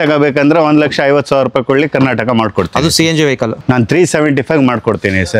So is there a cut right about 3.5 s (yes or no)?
yes